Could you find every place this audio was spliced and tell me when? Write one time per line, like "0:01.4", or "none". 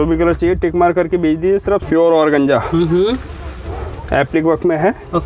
0:01.8